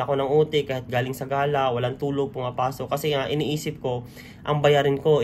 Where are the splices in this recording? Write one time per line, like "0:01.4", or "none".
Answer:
none